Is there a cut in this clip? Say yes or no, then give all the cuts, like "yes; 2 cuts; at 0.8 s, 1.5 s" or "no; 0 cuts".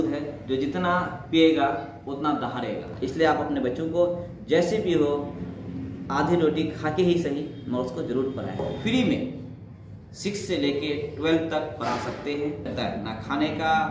yes; 3 cuts; at 2.8 s, 8.6 s, 12.7 s